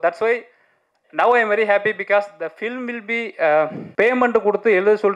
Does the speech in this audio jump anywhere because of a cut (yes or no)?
yes